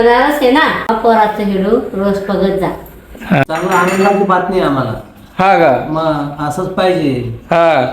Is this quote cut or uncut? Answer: cut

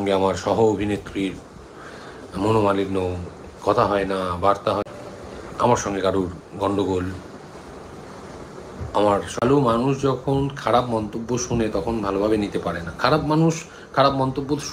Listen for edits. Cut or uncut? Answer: cut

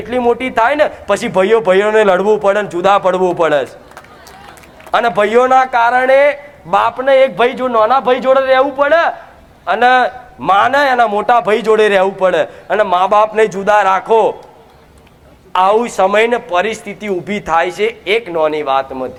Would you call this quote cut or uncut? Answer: uncut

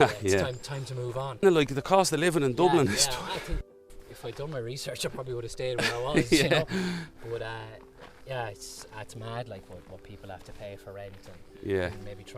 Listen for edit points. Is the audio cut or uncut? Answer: cut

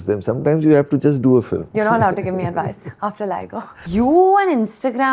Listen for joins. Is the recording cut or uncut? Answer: cut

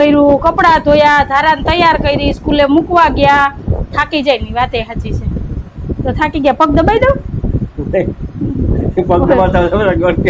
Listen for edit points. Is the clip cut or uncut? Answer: uncut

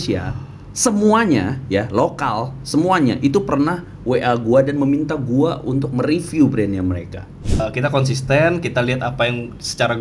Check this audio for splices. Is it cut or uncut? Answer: cut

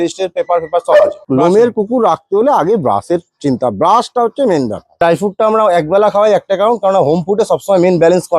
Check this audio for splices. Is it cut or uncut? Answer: cut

